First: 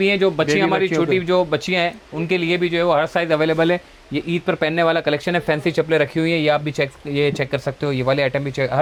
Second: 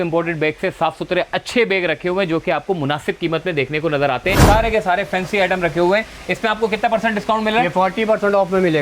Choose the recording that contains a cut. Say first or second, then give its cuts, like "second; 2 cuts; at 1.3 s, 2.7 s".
second; 1 cut; at 4.4 s